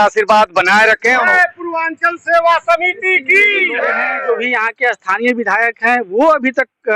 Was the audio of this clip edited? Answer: yes; 2 cuts; at 1.2 s, 4.1 s

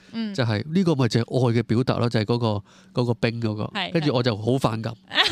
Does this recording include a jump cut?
no; 0 cuts

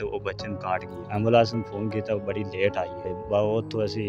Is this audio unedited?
no; 2 cuts; at 1.0 s, 3.1 s

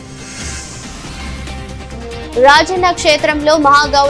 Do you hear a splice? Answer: yes; 1 cut; at 2.1 s

